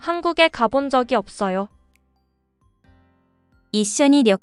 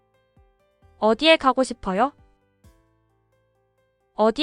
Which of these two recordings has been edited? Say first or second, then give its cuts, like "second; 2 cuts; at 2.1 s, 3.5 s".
second; 1 cut; at 1.0 s